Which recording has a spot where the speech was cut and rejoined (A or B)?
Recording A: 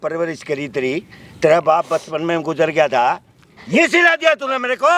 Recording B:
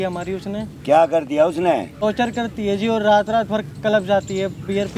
B